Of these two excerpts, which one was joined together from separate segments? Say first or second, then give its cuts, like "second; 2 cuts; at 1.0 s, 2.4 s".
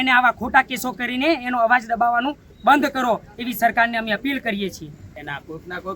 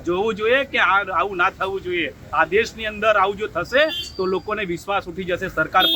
first; 1 cut; at 4.9 s